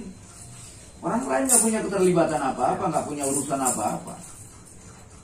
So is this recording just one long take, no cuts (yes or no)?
yes